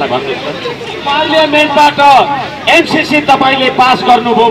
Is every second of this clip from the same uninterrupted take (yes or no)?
no